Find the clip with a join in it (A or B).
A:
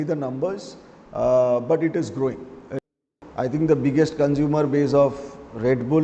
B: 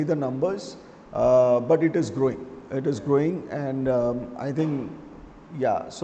A